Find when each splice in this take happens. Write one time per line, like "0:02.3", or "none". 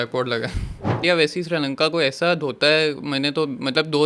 0:01.0